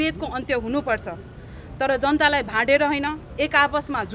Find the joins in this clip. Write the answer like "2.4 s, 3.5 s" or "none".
none

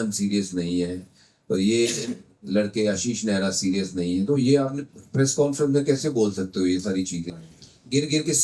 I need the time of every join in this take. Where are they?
7.3 s

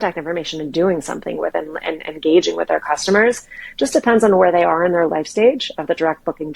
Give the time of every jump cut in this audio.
none

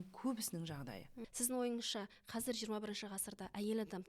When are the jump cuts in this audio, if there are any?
1.1 s

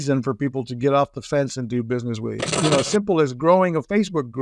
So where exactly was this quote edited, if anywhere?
2.5 s

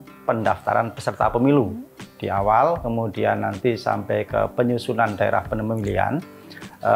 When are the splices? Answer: none

